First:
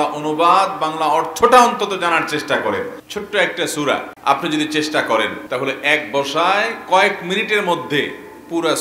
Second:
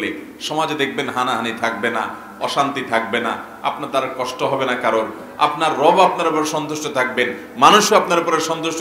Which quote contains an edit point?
first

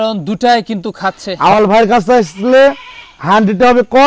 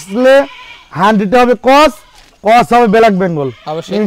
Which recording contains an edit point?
first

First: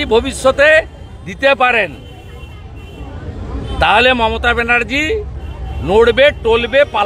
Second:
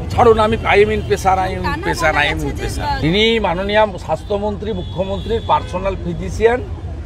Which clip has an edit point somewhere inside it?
second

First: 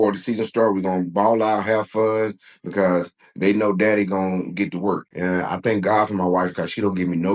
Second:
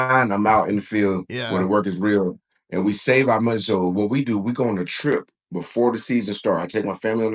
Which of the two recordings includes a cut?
first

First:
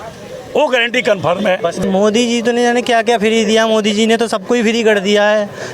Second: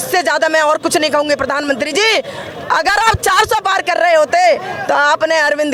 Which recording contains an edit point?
first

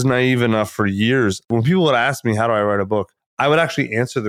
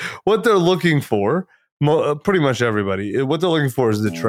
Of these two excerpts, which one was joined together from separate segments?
first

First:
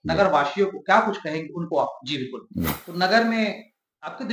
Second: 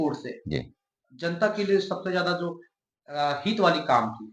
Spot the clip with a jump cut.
first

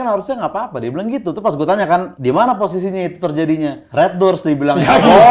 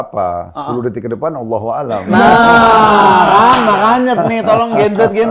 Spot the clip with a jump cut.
first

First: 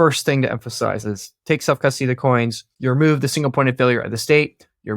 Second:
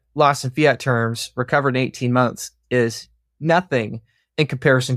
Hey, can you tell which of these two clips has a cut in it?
first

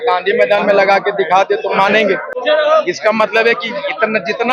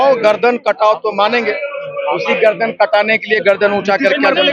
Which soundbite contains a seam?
first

